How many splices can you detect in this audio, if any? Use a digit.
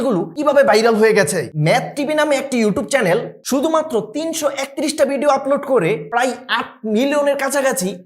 1